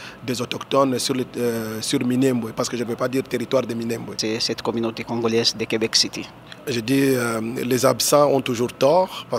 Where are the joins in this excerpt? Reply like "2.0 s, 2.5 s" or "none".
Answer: none